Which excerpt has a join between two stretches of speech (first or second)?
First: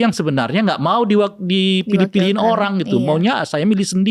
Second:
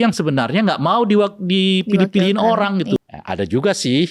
second